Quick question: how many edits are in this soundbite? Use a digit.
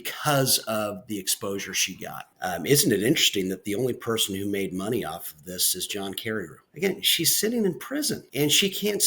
3